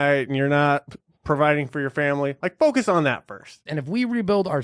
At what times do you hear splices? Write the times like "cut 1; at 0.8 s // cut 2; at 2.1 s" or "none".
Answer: cut 1; at 3.6 s